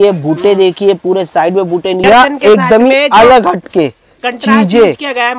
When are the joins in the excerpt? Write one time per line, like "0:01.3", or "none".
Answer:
0:02.0